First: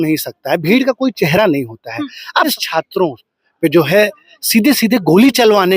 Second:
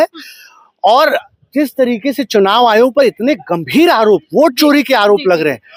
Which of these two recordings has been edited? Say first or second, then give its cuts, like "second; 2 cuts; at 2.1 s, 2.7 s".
first; 1 cut; at 2.5 s